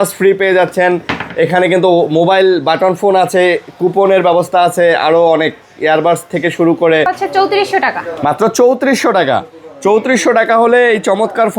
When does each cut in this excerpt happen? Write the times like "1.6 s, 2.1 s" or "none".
7.1 s